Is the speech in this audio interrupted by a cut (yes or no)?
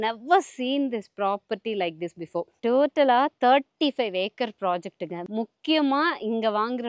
yes